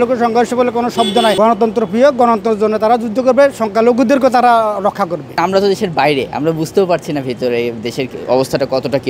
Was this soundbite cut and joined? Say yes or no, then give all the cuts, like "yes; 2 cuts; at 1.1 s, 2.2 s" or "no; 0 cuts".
yes; 2 cuts; at 1.4 s, 5.3 s